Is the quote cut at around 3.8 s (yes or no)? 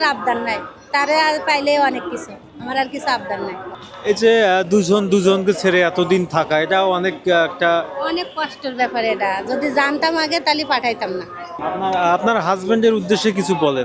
no